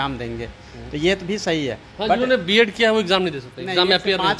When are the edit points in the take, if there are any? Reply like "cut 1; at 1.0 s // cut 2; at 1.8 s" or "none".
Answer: none